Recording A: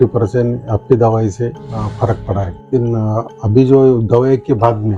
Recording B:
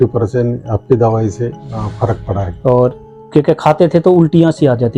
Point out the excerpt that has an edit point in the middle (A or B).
A